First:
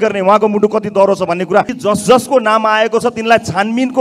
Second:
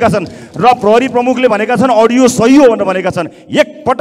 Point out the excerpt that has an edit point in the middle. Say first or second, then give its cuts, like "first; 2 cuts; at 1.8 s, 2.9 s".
first; 1 cut; at 1.7 s